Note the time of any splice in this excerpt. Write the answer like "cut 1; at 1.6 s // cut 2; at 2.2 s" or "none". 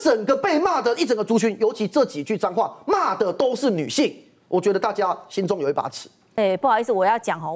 cut 1; at 6.3 s